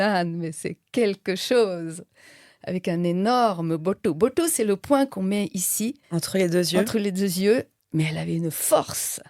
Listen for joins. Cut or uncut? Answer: cut